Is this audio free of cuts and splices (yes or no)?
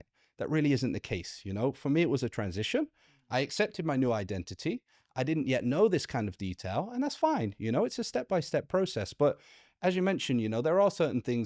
yes